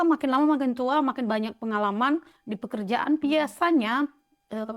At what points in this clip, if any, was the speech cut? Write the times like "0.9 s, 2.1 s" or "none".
none